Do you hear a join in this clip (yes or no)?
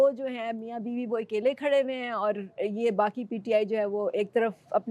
no